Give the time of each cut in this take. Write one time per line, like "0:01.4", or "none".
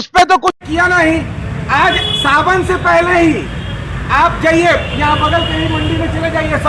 none